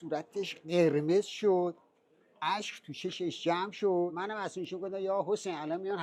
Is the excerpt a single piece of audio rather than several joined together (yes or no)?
no